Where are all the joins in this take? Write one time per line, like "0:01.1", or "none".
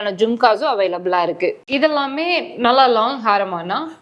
0:01.7